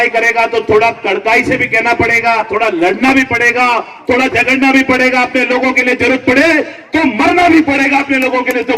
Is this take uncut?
no; 1 cut; at 2.5 s

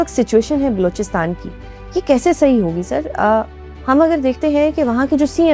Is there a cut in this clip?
no; 0 cuts

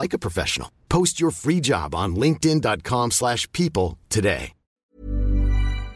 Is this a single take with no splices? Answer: no; 1 cut; at 4.9 s

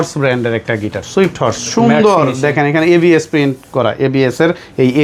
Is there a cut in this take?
no; 0 cuts

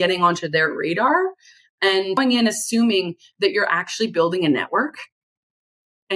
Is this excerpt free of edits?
no; 1 cut; at 2.2 s

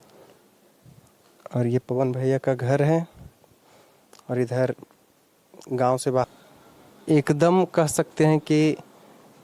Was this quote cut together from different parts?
yes; 1 cut; at 6.3 s

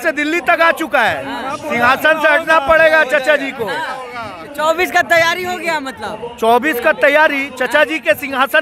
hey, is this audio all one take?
yes; 0 cuts

